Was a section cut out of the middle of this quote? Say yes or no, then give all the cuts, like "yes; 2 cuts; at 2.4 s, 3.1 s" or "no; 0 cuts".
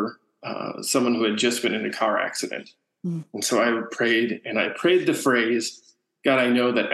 no; 0 cuts